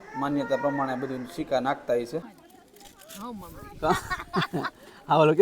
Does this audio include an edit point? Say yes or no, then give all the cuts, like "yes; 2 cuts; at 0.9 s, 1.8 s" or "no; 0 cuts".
yes; 1 cut; at 2.4 s